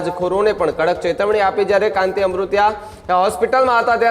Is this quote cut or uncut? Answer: uncut